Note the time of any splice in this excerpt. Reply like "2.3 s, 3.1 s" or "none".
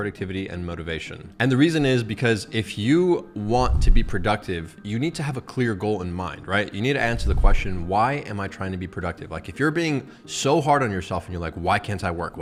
none